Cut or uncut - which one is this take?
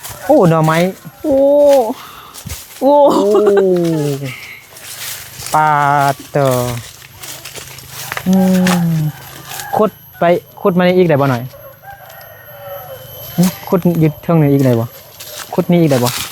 uncut